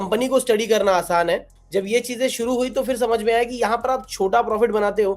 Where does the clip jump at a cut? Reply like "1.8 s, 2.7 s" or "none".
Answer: 1.5 s

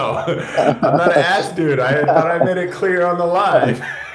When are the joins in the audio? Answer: none

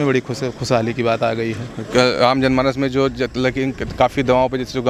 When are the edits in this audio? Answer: none

